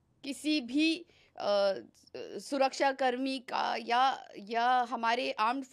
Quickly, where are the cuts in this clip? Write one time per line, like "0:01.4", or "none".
none